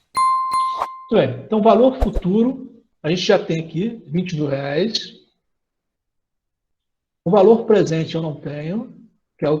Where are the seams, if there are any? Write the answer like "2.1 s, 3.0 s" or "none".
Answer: 1.0 s